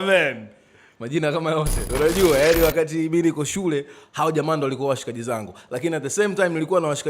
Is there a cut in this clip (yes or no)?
yes